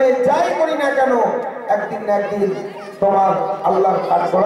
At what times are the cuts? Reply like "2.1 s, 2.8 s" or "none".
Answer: none